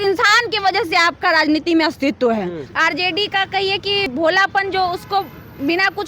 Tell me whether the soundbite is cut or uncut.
cut